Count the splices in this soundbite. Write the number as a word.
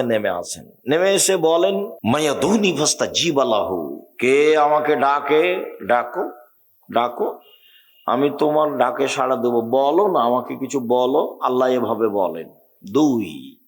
one